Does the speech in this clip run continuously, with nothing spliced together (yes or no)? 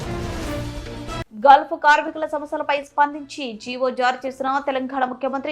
no